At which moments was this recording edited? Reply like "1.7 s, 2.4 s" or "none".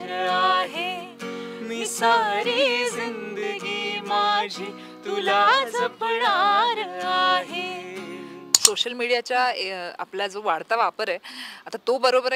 8.4 s